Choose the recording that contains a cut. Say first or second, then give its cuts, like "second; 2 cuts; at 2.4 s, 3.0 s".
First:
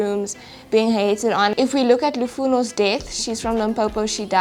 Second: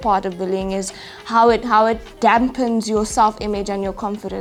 first; 1 cut; at 1.5 s